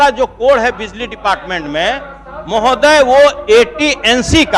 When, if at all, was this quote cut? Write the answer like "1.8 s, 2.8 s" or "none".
none